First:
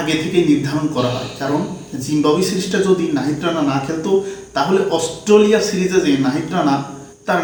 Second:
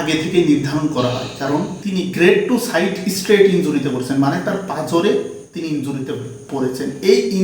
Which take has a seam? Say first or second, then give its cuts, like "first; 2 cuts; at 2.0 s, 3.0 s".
second; 1 cut; at 1.8 s